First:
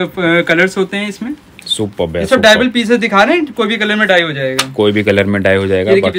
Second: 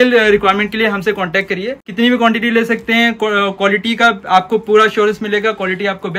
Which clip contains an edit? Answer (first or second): second